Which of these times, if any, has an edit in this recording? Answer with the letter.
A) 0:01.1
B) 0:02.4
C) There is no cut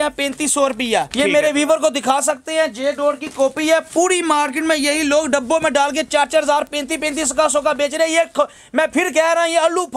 A